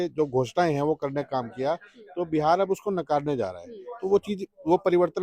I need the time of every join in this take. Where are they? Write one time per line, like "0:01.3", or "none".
none

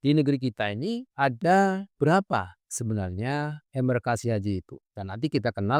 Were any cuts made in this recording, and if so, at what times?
none

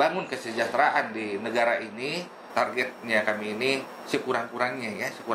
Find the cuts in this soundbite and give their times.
0:02.5

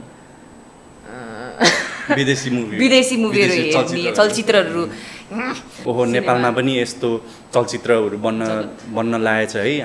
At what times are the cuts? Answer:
0:05.7

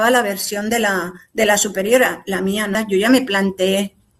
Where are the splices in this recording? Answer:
0:02.8

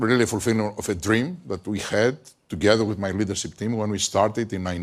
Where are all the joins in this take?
none

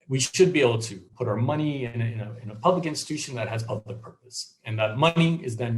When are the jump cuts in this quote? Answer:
0:01.0

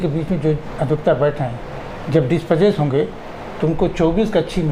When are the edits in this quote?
none

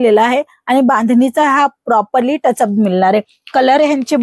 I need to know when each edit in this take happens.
none

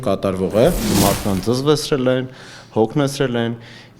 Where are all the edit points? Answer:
0:01.0

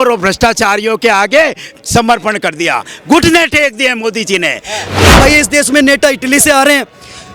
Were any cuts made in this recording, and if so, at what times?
0:04.9

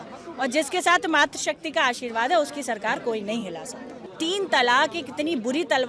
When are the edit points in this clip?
0:03.9

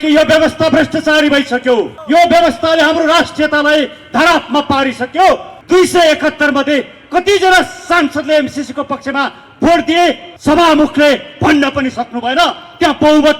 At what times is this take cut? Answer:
0:02.0
0:05.5
0:10.3

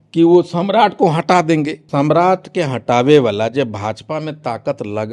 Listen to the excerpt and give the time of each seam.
0:01.8

